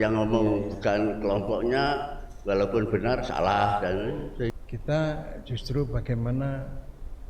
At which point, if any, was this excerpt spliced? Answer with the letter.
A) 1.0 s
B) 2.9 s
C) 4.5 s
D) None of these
C